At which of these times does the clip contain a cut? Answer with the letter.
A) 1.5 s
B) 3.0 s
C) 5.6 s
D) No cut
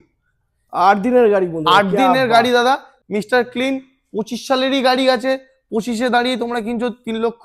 B